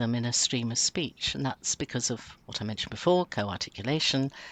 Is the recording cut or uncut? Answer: uncut